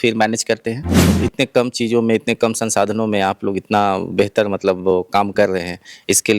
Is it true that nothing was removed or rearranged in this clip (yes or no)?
no